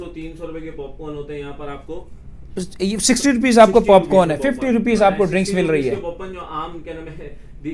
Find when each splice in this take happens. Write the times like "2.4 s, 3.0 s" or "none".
none